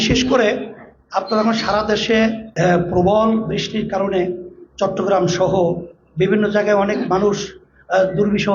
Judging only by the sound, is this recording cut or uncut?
cut